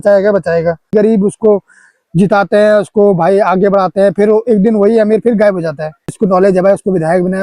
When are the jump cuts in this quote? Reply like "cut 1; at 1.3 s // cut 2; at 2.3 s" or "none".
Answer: cut 1; at 0.9 s // cut 2; at 6.1 s